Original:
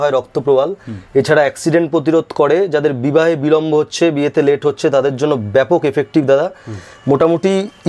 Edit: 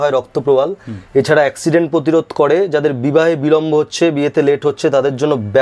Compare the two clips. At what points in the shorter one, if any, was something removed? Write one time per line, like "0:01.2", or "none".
none